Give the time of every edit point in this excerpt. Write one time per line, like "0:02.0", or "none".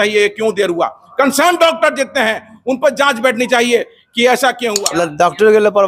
0:04.7

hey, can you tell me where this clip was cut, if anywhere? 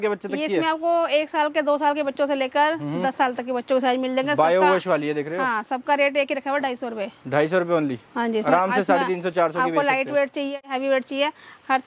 none

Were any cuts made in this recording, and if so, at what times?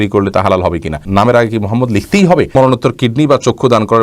0:01.0
0:02.5

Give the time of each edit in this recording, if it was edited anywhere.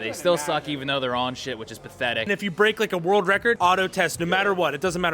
0:02.2
0:03.6

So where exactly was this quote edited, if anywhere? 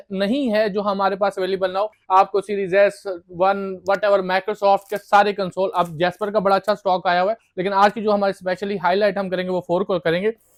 none

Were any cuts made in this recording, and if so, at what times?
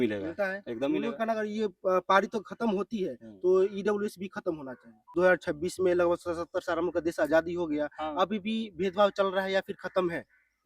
0:05.2

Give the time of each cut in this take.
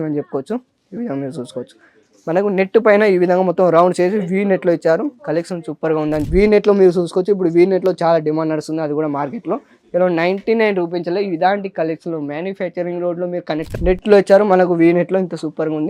0:06.2
0:13.7

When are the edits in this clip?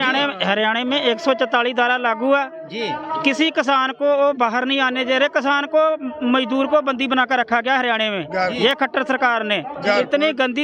none

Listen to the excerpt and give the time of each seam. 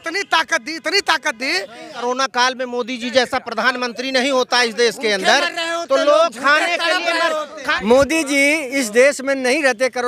0:02.0
0:07.7

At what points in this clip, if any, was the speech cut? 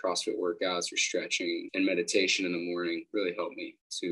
0:01.7
0:03.1

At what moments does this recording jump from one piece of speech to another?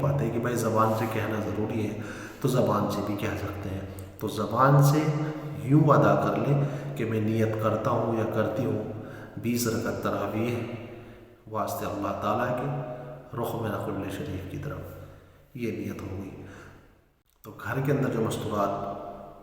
0:17.1

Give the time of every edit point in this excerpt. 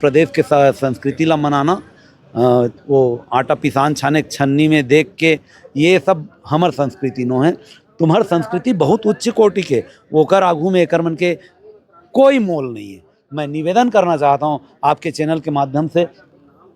none

